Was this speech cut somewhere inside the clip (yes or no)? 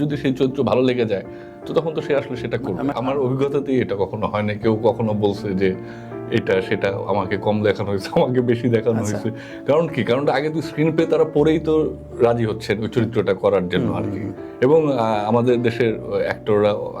yes